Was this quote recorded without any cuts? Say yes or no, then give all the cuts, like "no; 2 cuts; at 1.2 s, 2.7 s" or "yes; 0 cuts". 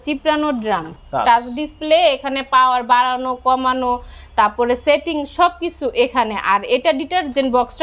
no; 1 cut; at 0.9 s